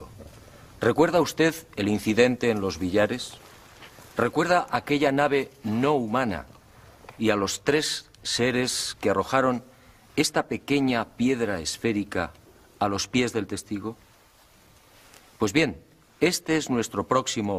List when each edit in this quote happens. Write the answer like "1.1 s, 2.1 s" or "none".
none